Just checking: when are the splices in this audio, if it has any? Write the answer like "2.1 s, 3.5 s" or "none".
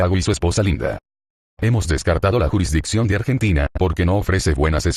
none